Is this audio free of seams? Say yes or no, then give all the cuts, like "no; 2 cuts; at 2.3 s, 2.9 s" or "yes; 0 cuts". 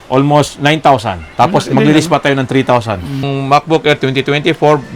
no; 1 cut; at 3.3 s